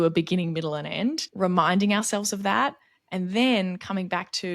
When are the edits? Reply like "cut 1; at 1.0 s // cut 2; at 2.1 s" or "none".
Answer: cut 1; at 1.3 s